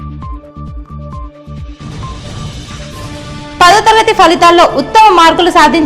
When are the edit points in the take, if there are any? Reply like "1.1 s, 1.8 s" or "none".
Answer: 1.7 s